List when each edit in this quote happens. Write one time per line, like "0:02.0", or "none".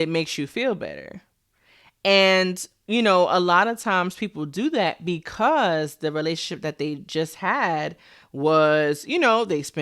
none